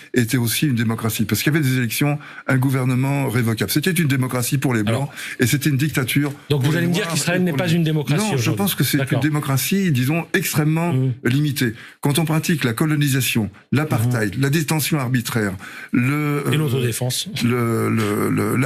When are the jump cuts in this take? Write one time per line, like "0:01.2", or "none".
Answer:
none